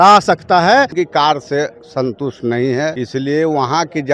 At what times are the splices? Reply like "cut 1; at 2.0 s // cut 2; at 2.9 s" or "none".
cut 1; at 0.9 s // cut 2; at 3.0 s